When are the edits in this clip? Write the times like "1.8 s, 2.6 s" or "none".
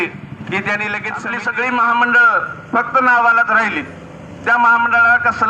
1.2 s